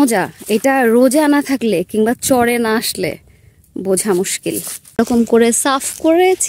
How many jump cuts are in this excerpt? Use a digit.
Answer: 1